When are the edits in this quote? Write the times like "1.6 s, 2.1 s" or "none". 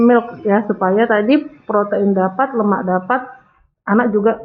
none